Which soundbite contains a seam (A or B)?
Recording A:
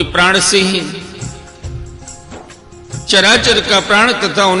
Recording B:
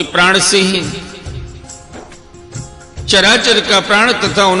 A